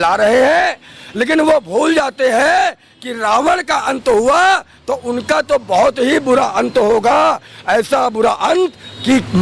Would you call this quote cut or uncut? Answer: uncut